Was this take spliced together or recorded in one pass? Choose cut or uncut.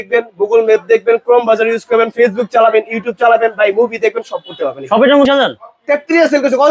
cut